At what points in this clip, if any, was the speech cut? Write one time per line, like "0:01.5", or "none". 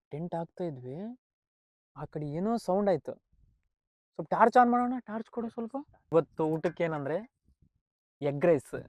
0:06.0